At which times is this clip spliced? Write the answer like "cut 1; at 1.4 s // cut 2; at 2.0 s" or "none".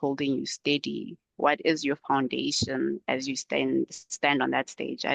none